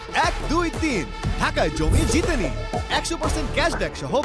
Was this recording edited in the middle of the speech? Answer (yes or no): no